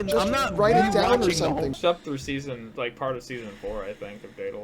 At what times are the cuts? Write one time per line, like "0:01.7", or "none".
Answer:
0:01.8